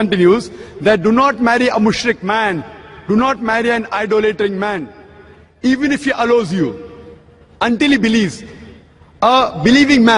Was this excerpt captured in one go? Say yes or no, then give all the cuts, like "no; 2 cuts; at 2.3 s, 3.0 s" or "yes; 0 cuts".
yes; 0 cuts